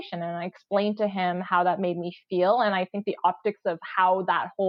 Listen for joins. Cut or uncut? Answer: uncut